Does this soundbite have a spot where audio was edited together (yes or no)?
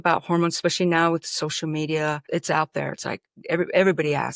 yes